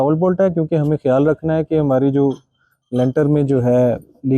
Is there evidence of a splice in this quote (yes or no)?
no